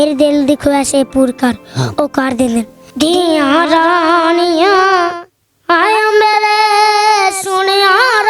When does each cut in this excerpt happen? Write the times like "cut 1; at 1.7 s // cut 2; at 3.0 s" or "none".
cut 1; at 2.8 s

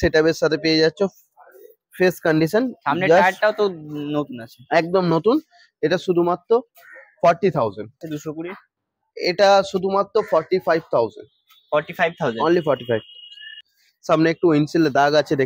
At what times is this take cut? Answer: cut 1; at 8.2 s // cut 2; at 13.6 s

